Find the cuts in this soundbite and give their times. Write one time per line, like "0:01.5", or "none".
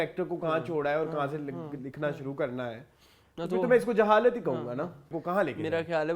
0:05.2